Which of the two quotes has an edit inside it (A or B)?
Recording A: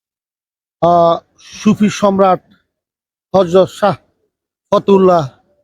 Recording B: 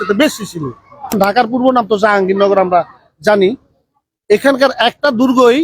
B